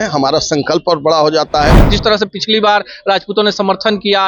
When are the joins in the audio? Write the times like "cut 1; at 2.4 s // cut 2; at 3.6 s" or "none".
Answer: cut 1; at 1.9 s

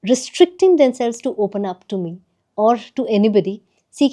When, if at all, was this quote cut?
none

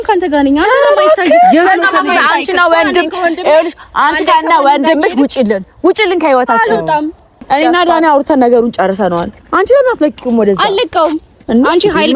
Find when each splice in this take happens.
cut 1; at 7.4 s

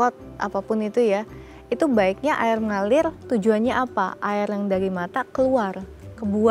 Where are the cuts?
none

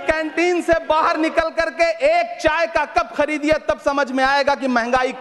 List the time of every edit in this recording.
none

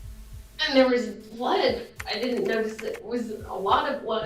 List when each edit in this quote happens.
cut 1; at 2.0 s

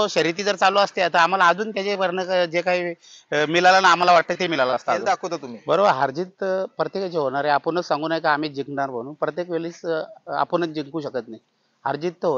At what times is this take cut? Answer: cut 1; at 5.1 s

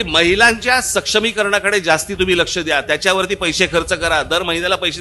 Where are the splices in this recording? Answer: none

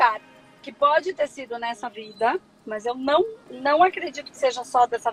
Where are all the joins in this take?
none

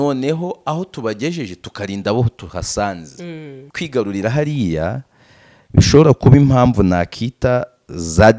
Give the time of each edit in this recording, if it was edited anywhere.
cut 1; at 3.6 s

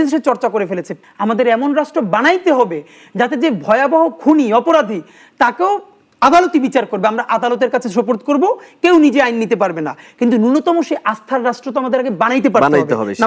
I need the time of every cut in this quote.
cut 1; at 1.0 s

